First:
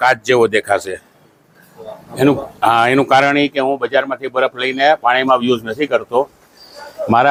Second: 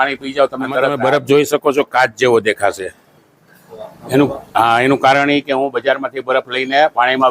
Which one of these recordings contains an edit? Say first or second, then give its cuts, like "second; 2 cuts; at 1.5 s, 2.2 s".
second; 1 cut; at 0.9 s